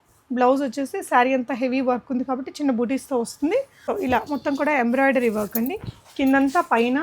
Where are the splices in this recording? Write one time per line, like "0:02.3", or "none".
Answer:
0:03.8